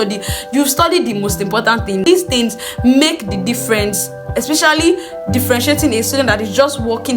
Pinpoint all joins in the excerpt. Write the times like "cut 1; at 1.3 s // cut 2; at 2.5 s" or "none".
cut 1; at 2.1 s